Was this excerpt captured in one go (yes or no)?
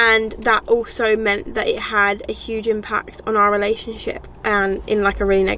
yes